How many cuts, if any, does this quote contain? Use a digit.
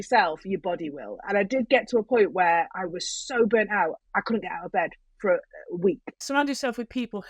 2